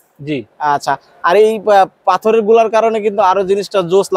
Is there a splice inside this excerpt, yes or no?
no